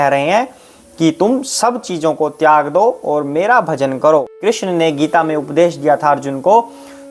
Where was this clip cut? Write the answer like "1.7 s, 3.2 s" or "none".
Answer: 4.3 s